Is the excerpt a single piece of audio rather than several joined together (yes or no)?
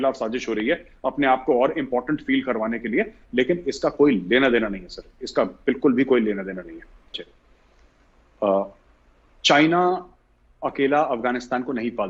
yes